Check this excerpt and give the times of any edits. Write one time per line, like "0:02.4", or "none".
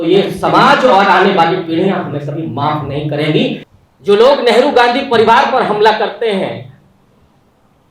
0:03.6